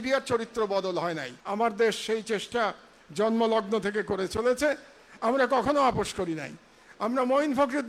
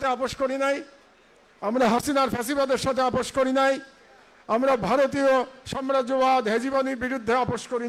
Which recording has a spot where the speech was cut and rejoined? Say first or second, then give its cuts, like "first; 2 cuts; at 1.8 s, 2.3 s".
first; 1 cut; at 1.3 s